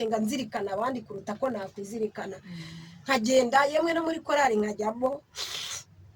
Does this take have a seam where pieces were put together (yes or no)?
yes